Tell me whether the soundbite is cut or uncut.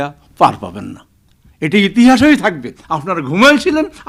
uncut